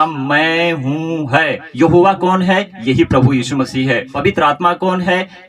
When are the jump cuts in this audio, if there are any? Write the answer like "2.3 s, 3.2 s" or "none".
1.6 s, 4.1 s